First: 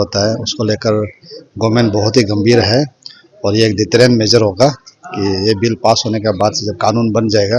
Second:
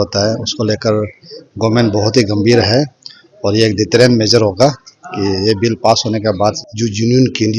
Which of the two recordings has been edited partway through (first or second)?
second